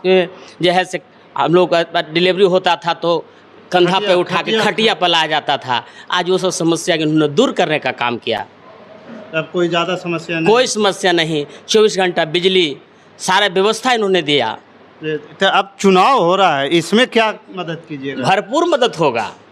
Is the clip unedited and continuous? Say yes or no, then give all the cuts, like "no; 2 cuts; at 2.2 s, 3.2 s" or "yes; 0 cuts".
yes; 0 cuts